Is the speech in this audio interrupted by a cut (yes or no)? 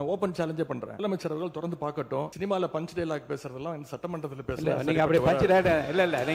yes